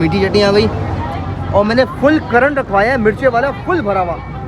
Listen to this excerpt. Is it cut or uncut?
uncut